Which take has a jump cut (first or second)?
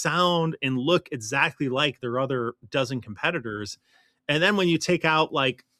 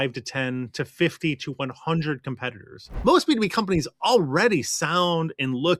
second